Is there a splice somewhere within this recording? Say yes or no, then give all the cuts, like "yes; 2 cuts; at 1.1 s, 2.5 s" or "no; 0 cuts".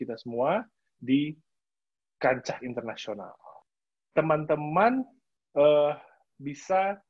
yes; 1 cut; at 3.6 s